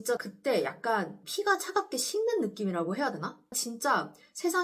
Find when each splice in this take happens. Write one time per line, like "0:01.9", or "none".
0:03.5